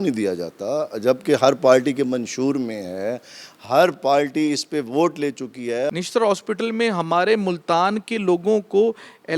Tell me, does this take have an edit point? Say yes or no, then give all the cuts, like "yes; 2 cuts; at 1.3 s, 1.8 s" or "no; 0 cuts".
yes; 1 cut; at 5.9 s